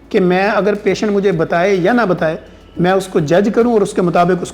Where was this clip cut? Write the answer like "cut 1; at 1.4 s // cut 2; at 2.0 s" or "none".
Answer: none